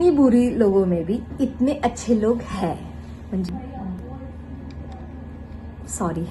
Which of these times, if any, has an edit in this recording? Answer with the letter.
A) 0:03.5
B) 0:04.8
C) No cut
A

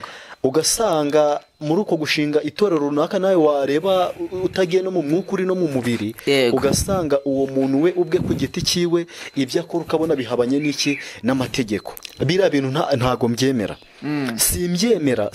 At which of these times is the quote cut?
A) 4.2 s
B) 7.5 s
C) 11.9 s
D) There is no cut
C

